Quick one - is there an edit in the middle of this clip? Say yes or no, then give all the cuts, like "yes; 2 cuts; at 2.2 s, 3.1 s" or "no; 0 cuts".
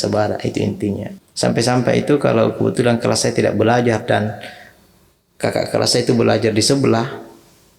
yes; 1 cut; at 1.1 s